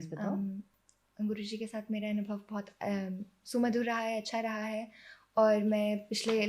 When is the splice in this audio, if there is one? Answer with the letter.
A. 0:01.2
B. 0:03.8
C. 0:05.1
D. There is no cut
D